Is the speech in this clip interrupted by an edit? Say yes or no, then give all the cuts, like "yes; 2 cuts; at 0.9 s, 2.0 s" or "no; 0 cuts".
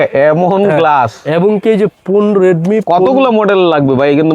no; 0 cuts